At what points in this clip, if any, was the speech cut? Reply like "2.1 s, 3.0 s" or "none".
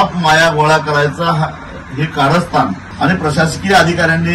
2.8 s